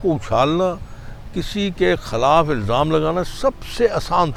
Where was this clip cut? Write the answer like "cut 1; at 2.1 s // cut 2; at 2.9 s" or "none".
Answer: none